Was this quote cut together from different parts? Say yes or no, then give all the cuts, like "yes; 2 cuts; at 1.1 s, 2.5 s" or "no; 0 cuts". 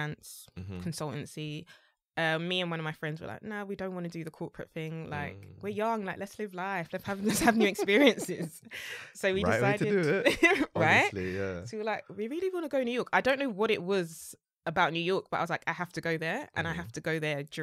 no; 0 cuts